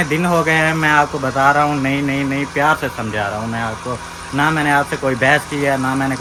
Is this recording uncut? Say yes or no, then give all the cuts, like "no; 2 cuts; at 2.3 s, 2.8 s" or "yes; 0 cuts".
yes; 0 cuts